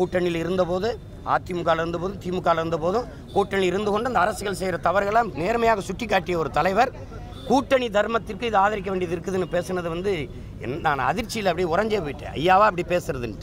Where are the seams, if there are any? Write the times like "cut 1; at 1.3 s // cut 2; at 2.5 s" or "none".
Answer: none